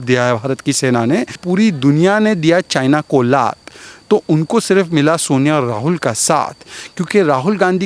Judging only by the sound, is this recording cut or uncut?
cut